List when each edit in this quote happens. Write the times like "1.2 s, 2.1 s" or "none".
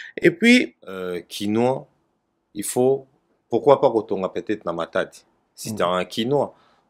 1.1 s